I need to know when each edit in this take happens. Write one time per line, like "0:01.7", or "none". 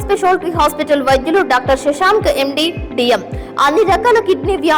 none